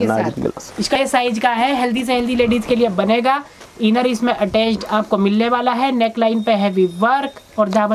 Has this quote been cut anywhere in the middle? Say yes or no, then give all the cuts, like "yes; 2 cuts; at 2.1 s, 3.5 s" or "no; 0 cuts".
yes; 1 cut; at 1.0 s